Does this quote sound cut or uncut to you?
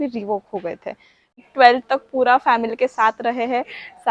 cut